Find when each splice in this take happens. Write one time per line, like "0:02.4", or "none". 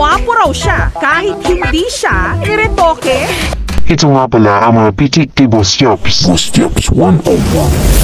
0:03.4